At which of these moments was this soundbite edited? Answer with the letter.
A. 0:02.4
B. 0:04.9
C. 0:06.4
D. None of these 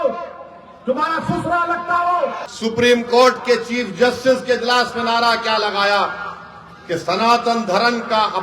A